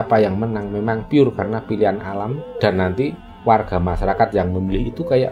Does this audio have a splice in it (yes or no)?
no